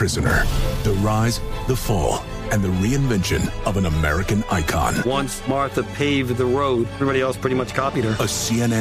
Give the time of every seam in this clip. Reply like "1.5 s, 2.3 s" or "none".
none